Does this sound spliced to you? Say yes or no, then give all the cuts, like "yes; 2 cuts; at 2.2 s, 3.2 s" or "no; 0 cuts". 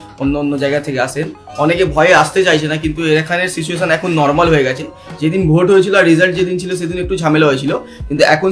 no; 0 cuts